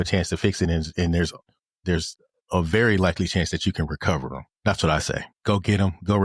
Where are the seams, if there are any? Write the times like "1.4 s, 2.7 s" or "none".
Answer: 4.5 s, 5.3 s